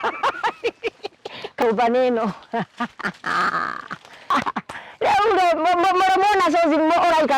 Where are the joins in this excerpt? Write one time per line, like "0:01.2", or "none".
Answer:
0:01.6